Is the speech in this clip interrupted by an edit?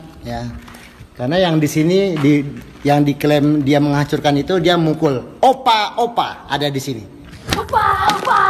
yes; 1 cut; at 7.4 s

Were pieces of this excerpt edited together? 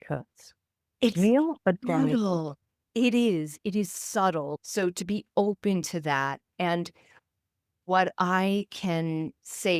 yes; 1 cut; at 4.5 s

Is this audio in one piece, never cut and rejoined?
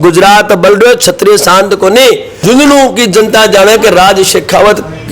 no; 1 cut; at 2.3 s

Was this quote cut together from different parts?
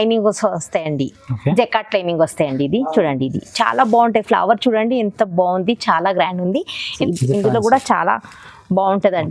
yes; 1 cut; at 6.9 s

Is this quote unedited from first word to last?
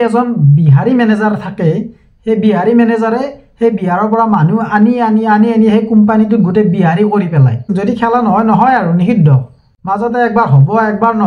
no; 1 cut; at 7.7 s

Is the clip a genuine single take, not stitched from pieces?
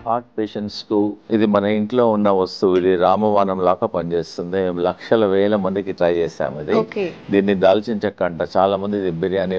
no; 1 cut; at 1.2 s

